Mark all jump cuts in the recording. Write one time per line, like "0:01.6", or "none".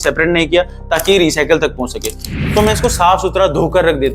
0:02.4